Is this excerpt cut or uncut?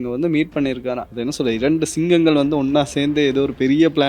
cut